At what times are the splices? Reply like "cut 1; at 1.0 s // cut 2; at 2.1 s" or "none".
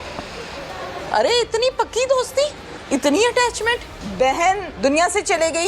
cut 1; at 1.0 s // cut 2; at 2.7 s // cut 3; at 4.0 s // cut 4; at 4.7 s